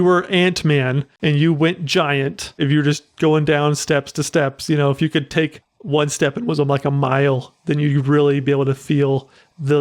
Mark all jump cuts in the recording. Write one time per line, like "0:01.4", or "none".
0:01.1
0:02.6